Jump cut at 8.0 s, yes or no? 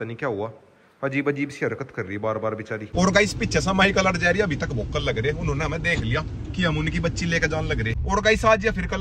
yes